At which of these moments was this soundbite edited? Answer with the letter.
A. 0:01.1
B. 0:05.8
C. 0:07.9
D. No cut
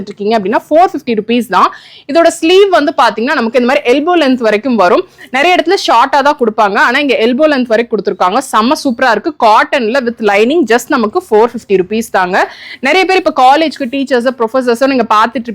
D